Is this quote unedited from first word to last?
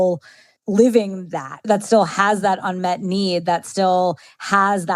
no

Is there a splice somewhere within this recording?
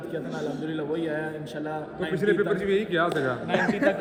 no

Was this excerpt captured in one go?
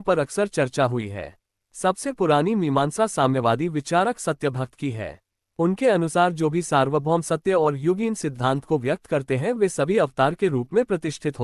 yes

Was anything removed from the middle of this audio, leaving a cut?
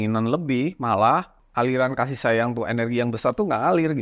yes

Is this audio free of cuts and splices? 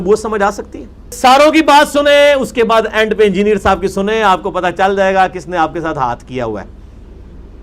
no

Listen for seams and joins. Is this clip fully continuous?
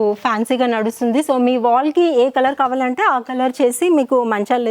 yes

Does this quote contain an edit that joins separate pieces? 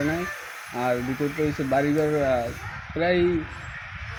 no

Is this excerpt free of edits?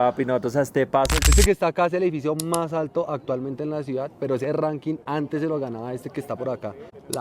no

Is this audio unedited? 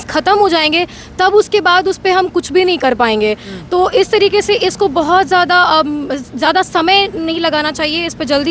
yes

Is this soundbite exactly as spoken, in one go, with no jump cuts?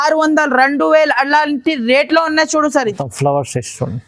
no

